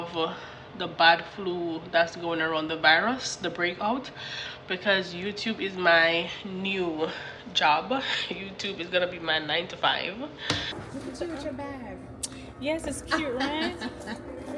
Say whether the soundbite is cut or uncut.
cut